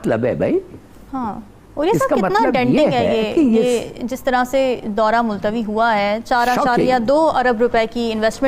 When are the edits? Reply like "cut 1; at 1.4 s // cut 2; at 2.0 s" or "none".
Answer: none